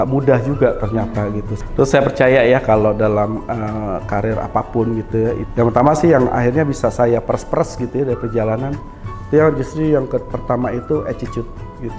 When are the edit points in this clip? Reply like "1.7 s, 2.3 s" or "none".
1.5 s, 5.4 s